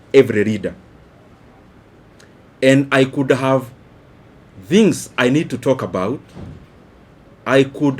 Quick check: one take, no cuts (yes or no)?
yes